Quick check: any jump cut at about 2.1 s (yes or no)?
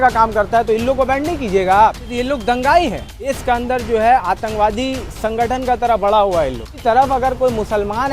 yes